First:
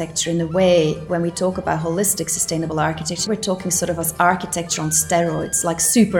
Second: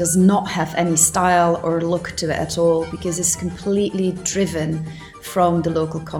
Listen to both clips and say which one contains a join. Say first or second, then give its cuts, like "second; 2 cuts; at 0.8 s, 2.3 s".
first; 2 cuts; at 1.0 s, 3.3 s